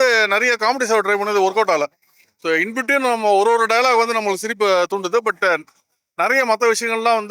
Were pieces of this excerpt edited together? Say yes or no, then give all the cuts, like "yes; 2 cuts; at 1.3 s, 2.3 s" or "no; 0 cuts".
no; 0 cuts